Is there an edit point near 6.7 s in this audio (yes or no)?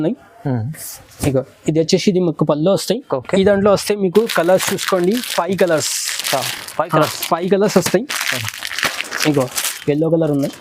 no